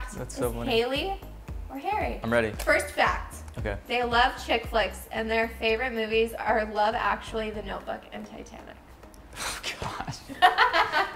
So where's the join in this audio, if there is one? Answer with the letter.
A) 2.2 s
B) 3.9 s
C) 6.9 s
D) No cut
A